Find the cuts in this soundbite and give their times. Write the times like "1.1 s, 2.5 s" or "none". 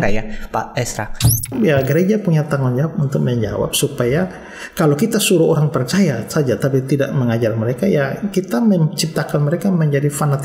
1.5 s